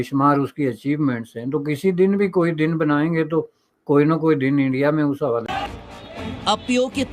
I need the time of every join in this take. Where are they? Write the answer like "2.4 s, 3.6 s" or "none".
5.4 s